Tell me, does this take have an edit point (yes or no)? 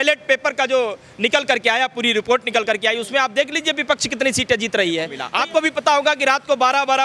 yes